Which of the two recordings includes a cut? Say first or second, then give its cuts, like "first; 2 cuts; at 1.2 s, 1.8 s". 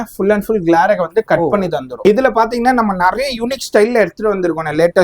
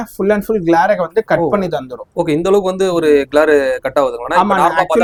first; 1 cut; at 1.9 s